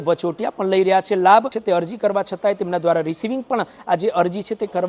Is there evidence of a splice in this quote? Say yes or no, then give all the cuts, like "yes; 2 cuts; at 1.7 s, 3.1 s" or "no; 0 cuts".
yes; 1 cut; at 1.6 s